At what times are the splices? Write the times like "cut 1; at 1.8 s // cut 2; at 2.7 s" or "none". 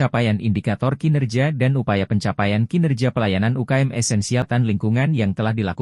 cut 1; at 4.5 s